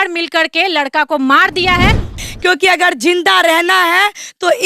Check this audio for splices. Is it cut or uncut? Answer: cut